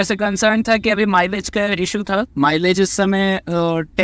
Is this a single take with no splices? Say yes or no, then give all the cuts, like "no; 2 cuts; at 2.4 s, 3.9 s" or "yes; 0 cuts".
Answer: yes; 0 cuts